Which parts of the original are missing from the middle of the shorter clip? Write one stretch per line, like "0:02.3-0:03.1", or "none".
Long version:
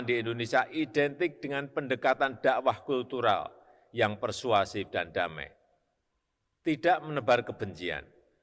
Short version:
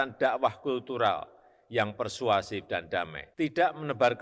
0:05.4-0:06.5